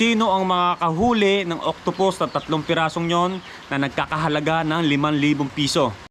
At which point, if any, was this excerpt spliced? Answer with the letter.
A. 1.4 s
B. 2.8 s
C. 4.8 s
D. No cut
D